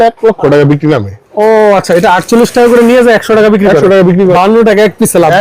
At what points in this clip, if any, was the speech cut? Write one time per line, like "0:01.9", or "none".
0:01.2
0:04.3